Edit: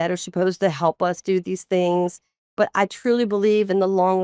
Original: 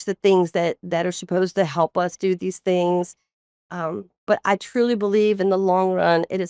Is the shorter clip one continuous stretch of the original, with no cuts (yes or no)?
no